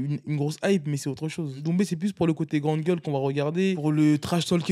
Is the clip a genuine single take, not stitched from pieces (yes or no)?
no